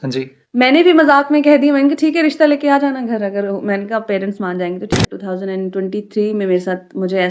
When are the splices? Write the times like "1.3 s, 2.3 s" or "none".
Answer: 5.0 s

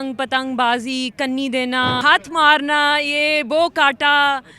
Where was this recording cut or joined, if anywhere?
2.0 s

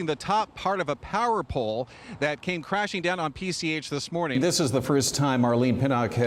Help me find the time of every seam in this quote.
4.4 s

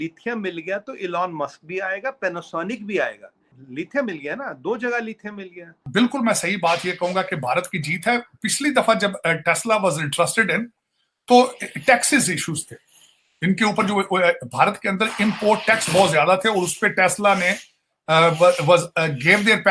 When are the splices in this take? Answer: 3.6 s, 5.9 s

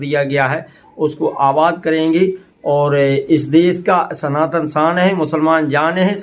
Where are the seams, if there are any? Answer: none

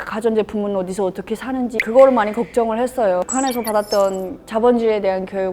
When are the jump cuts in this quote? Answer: 1.8 s, 3.2 s

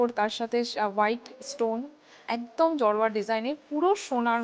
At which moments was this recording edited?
none

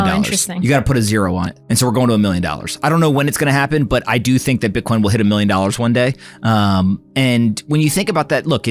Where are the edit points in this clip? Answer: 1.5 s

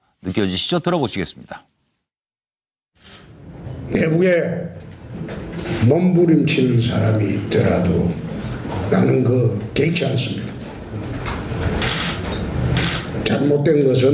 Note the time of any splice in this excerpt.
5.8 s

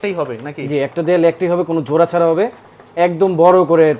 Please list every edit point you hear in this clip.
none

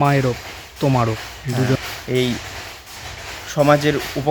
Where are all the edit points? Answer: 1.8 s

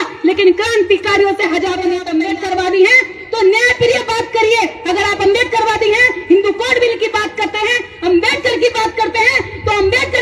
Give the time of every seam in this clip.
2.0 s

